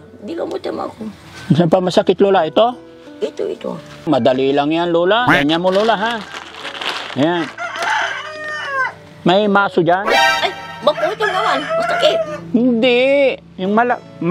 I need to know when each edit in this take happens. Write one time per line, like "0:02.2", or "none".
0:04.1
0:05.3
0:10.2